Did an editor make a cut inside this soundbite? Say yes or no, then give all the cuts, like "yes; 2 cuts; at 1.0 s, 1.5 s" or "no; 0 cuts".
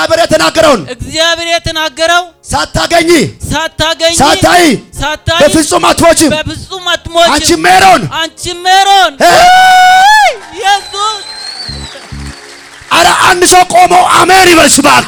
no; 0 cuts